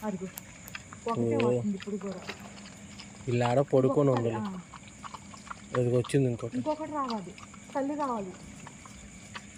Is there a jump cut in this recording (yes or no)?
no